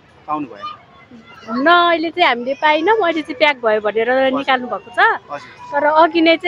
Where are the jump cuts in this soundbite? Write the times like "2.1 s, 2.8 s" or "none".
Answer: none